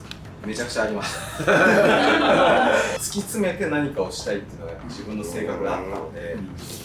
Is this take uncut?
no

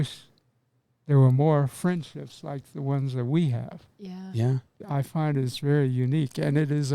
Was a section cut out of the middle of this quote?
yes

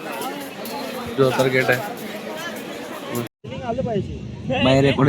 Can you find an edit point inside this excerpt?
yes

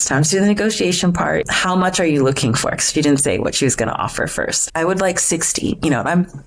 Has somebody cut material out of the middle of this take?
yes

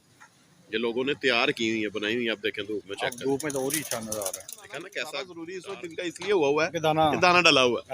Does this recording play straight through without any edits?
no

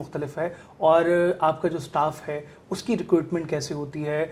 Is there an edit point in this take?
no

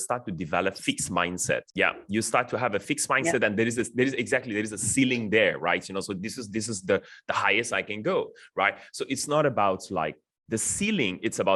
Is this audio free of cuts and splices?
yes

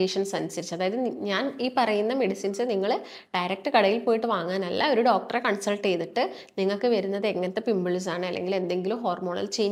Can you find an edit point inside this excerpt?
no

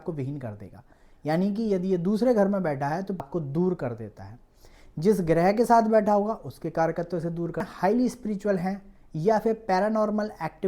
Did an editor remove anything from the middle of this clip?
yes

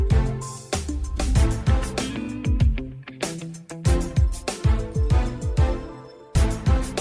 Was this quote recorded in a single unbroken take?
yes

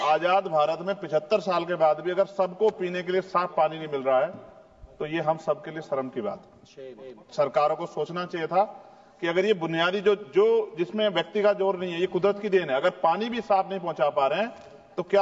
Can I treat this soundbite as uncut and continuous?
yes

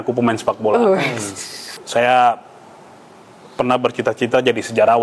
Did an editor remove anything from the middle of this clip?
yes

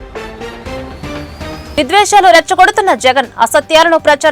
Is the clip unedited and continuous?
no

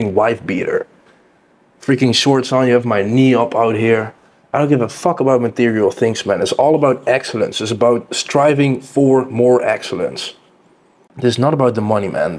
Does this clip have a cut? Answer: yes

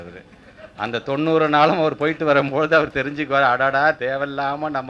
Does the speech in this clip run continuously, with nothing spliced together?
no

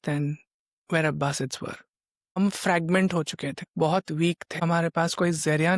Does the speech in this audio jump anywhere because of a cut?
yes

